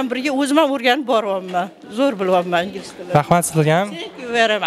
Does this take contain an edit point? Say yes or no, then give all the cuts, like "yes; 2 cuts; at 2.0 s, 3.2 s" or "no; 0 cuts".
no; 0 cuts